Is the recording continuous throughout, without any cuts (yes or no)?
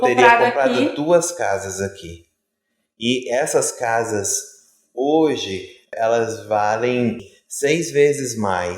no